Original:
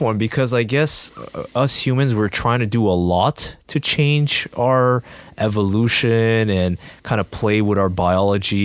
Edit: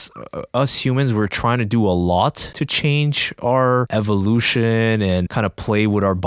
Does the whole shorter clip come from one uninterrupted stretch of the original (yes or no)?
no